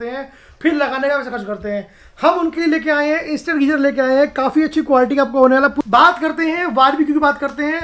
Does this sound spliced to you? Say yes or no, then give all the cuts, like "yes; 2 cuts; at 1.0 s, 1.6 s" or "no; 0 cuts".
yes; 1 cut; at 5.7 s